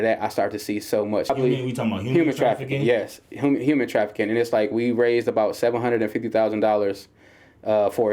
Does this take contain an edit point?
yes; 1 cut; at 1.3 s

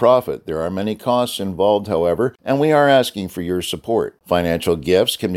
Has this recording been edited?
yes; 1 cut; at 2.4 s

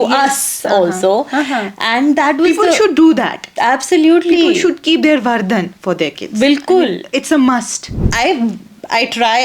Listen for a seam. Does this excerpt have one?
yes; 1 cut; at 7.9 s

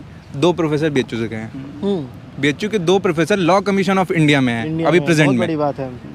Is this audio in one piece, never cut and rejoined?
yes; 0 cuts

